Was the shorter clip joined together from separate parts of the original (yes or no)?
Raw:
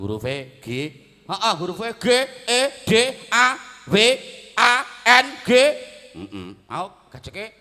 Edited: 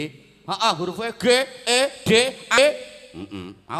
yes